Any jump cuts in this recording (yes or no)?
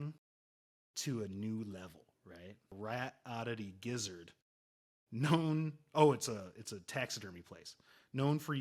yes